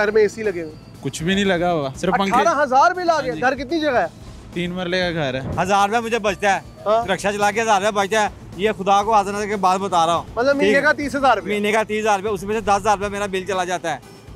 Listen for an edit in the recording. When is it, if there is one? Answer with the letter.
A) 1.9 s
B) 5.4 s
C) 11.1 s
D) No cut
B